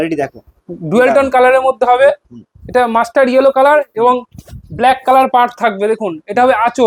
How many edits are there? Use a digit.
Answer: 0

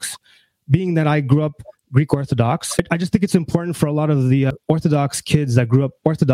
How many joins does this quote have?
2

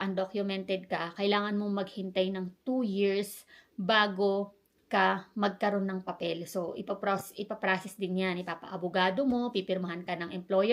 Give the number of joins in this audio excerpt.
0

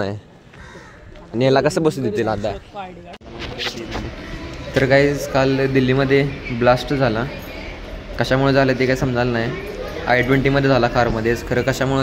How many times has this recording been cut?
1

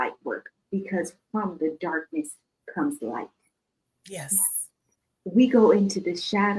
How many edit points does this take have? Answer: 0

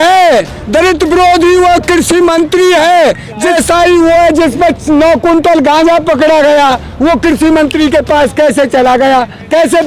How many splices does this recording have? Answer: 1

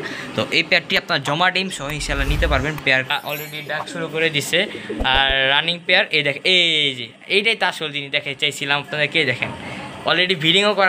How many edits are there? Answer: 1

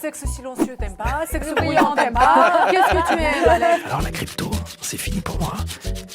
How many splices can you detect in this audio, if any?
1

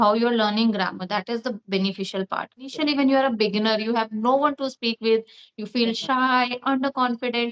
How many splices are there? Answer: 1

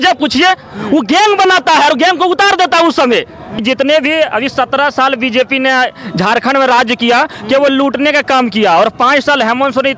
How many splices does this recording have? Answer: 1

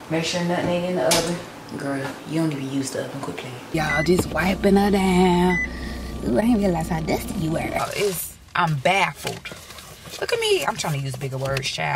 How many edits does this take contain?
2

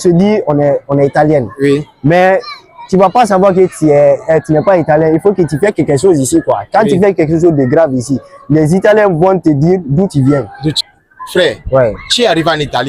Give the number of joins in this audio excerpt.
1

